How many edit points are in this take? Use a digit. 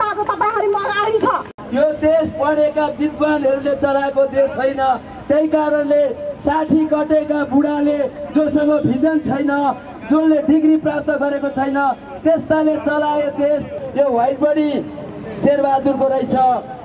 2